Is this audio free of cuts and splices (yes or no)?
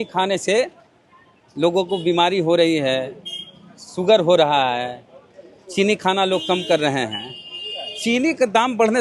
yes